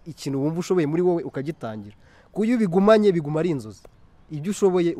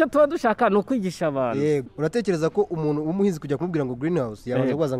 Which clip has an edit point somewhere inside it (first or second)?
second